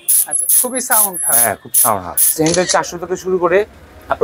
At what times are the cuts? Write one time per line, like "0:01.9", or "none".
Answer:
0:02.4